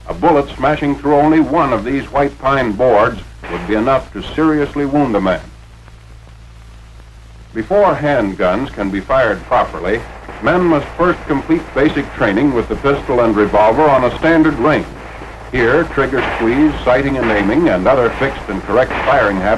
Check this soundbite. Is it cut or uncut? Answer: cut